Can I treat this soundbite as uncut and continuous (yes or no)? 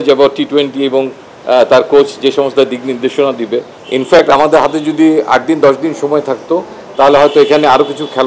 no